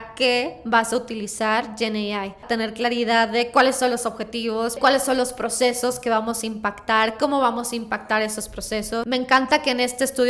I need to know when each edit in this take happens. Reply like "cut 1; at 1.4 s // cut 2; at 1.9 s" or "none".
cut 1; at 2.4 s // cut 2; at 4.8 s // cut 3; at 9.0 s